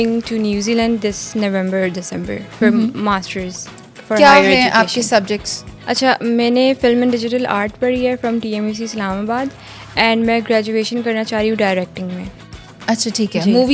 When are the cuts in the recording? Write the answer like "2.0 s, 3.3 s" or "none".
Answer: none

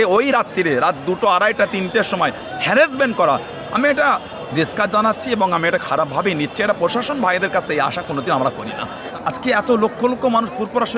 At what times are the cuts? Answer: 9.0 s

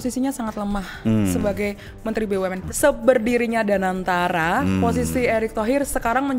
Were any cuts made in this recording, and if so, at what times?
2.6 s

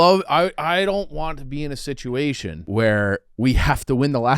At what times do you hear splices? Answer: 2.5 s, 3.3 s

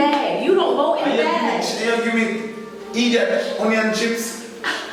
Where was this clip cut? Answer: none

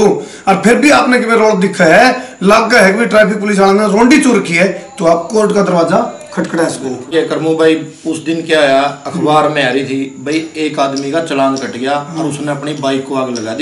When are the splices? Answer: 7.1 s

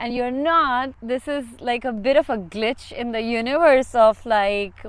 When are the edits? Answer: 1.0 s

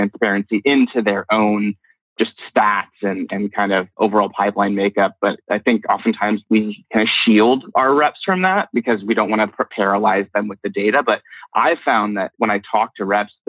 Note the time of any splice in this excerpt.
1.9 s, 3.9 s, 5.4 s, 6.4 s, 12.3 s

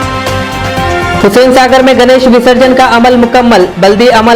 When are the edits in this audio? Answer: 1.2 s

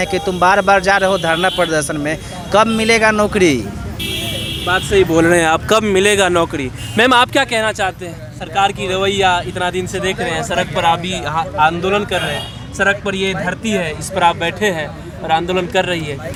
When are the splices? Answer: none

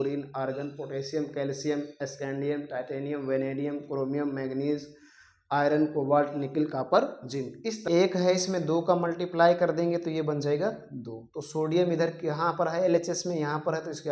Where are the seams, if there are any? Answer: 7.7 s

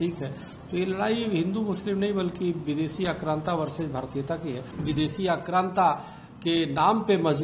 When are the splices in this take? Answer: 4.7 s

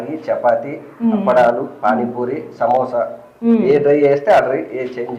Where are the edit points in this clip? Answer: none

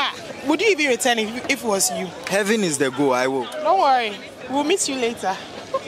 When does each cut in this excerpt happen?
none

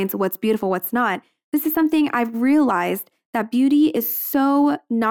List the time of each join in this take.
none

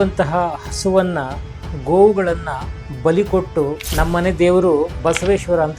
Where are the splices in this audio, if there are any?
3.8 s, 4.9 s

